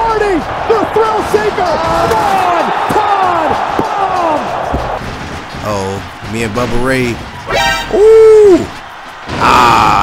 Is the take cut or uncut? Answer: cut